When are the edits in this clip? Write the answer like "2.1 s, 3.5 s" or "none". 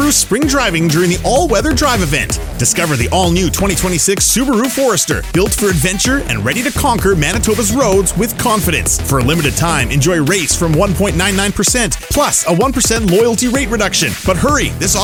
none